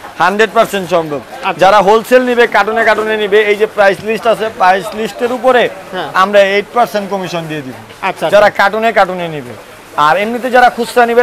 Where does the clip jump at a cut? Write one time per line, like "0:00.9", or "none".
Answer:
none